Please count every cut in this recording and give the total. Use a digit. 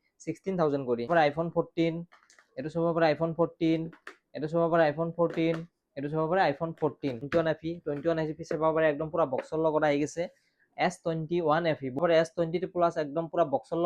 3